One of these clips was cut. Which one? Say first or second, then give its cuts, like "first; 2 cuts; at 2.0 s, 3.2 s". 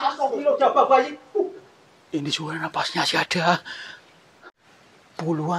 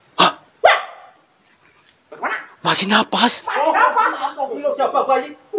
first; 1 cut; at 4.5 s